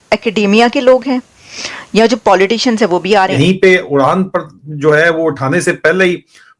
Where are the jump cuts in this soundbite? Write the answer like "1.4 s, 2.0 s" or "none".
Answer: 3.3 s